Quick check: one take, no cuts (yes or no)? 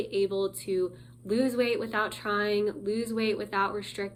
yes